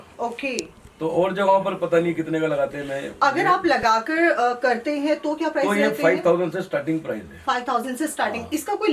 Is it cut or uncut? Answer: uncut